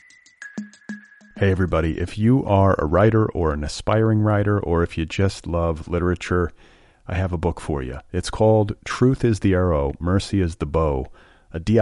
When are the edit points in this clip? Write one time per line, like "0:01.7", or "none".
0:00.9